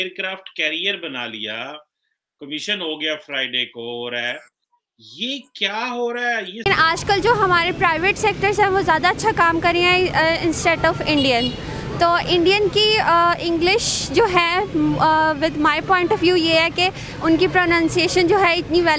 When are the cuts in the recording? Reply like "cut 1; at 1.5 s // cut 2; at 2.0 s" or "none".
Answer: cut 1; at 6.7 s